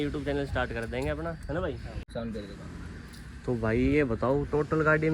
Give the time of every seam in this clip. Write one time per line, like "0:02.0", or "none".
0:02.1